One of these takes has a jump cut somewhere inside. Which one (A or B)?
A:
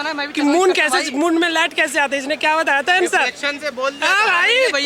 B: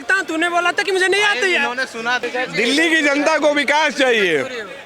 B